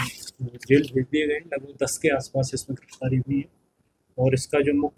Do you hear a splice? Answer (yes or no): no